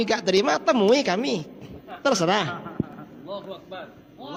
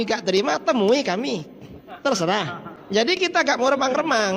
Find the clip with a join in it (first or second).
second